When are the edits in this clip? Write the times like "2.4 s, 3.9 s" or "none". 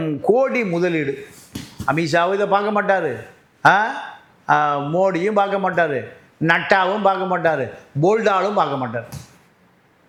none